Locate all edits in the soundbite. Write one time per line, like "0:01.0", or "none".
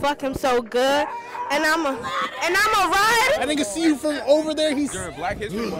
0:03.4